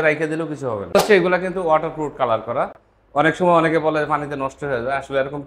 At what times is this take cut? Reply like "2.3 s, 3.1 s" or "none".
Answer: 1.0 s